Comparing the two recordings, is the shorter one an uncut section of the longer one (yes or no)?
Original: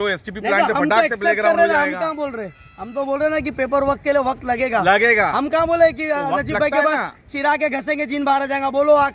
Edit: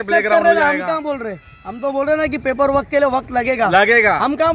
yes